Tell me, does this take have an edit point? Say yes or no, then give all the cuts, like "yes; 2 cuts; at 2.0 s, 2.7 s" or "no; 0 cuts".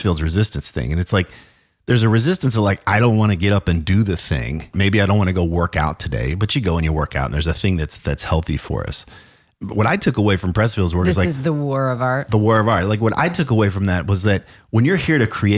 yes; 2 cuts; at 4.7 s, 9.5 s